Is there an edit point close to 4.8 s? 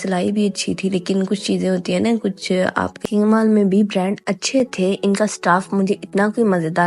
no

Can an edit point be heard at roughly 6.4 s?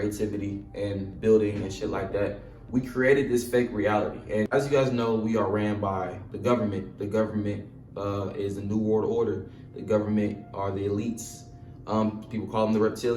no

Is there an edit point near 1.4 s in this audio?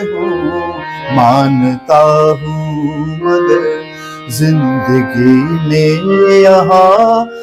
no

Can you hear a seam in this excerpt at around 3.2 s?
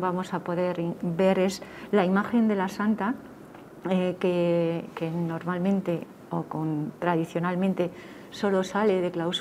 no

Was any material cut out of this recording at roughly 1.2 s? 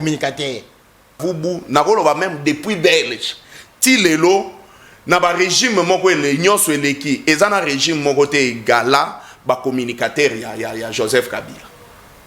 yes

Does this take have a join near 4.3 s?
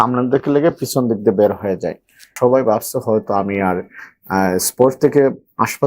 no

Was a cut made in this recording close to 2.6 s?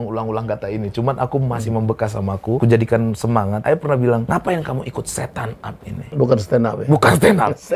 yes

